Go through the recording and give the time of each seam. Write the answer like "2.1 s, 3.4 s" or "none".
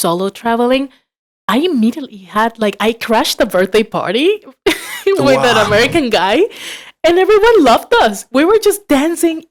none